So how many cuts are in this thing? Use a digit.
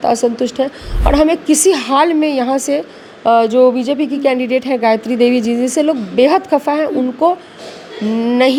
0